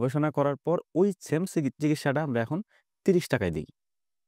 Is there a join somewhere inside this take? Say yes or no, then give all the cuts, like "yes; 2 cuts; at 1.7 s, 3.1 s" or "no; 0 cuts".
no; 0 cuts